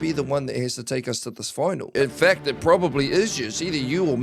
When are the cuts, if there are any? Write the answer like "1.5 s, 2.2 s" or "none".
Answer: 1.9 s